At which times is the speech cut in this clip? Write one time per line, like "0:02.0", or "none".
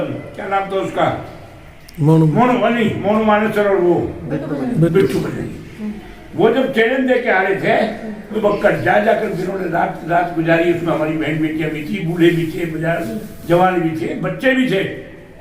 0:08.4